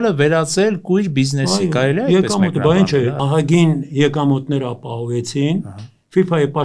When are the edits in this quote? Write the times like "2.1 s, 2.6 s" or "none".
3.2 s